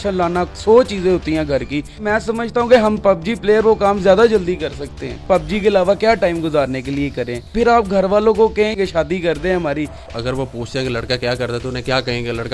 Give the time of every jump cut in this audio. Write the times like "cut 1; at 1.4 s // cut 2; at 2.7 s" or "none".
cut 1; at 2.0 s // cut 2; at 5.2 s // cut 3; at 7.4 s // cut 4; at 8.8 s // cut 5; at 10.0 s